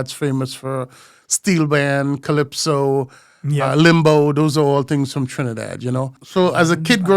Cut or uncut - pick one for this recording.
cut